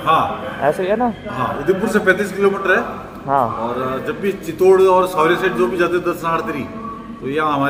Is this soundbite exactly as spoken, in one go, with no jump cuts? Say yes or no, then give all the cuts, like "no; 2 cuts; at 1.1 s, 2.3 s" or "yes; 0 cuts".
yes; 0 cuts